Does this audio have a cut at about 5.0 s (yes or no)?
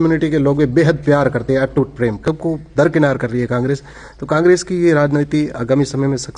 no